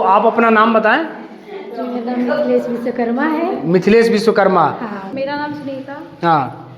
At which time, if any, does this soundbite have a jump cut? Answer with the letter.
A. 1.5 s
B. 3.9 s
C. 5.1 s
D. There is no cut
C